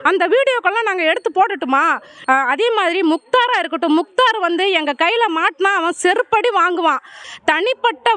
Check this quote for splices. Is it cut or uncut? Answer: cut